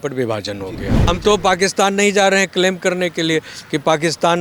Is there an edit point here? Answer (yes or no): yes